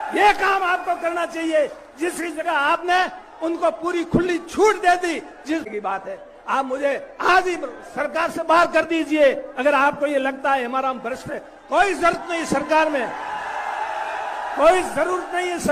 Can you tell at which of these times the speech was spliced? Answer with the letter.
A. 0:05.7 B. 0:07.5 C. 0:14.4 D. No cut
A